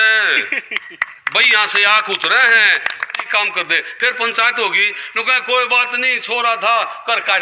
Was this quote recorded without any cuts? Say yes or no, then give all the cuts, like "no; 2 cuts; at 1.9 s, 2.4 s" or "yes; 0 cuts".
no; 1 cut; at 3.2 s